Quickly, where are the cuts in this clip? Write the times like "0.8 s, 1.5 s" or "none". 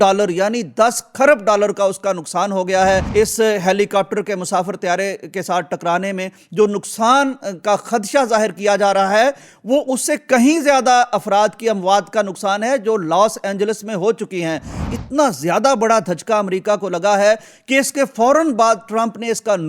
3.1 s, 14.9 s